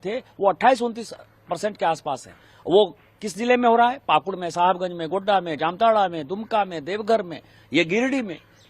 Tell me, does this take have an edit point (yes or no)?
no